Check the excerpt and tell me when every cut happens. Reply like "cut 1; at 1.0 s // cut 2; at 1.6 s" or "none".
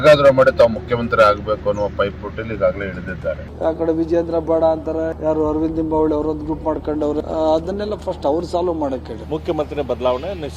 cut 1; at 3.5 s // cut 2; at 5.1 s // cut 3; at 7.2 s // cut 4; at 9.1 s

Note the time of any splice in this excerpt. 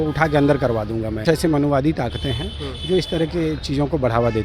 cut 1; at 1.2 s

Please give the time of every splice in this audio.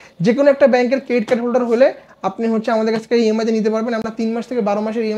none

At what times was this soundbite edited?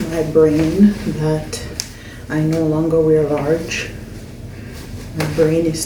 none

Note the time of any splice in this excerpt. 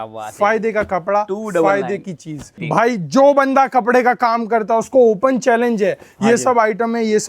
cut 1; at 2.6 s

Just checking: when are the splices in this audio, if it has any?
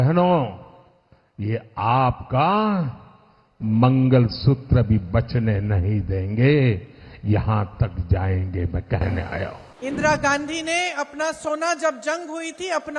cut 1; at 9.7 s

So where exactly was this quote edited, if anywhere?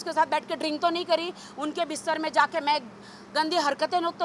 none

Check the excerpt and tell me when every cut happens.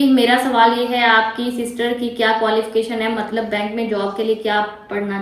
none

